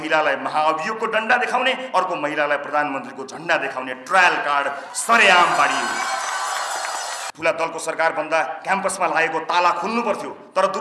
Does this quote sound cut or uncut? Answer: cut